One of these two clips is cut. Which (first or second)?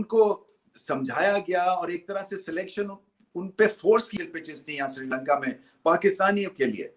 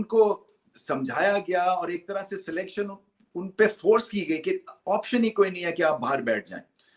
first